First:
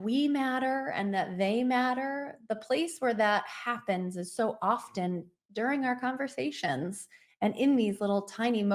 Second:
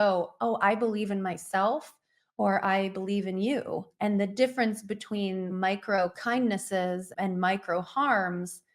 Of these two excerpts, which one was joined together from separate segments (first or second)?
second